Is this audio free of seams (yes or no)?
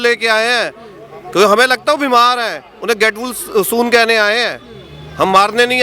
yes